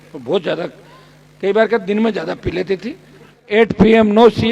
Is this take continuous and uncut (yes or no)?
no